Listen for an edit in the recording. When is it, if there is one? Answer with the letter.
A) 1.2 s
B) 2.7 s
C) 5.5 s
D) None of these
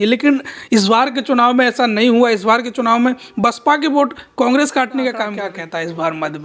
C